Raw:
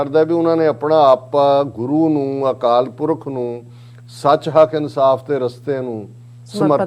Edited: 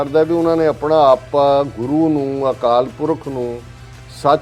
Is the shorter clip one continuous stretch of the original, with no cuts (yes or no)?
yes